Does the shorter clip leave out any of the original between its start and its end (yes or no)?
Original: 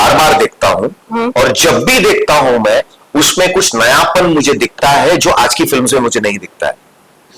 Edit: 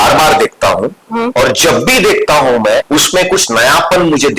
yes